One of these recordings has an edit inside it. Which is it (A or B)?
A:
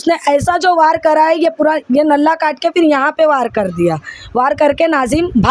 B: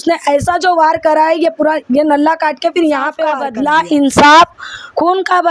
B